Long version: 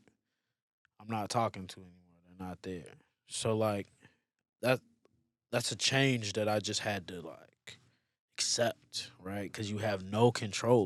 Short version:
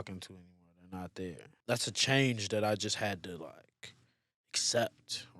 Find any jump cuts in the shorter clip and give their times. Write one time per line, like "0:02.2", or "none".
0:01.5